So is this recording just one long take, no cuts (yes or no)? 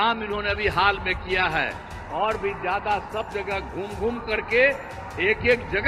yes